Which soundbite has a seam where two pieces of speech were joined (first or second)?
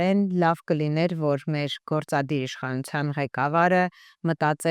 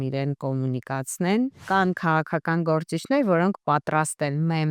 second